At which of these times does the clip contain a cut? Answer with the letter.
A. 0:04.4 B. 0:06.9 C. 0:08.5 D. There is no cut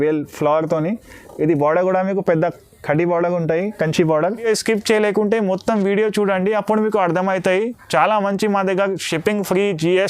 A